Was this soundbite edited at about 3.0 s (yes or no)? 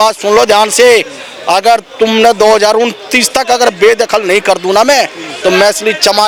no